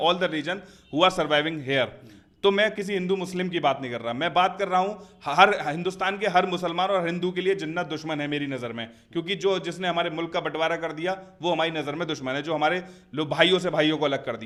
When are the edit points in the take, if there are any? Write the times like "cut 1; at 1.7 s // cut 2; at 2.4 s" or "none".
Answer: none